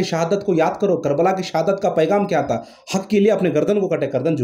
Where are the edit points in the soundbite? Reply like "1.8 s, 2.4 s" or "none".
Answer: none